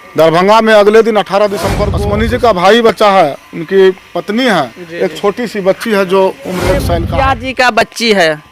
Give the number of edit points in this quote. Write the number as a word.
two